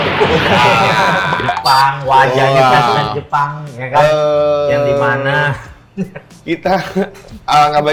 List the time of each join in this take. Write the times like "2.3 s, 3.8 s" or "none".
none